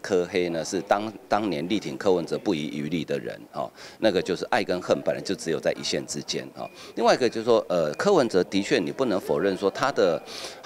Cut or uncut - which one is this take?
uncut